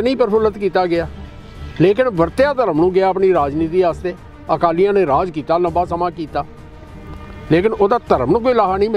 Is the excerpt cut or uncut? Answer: uncut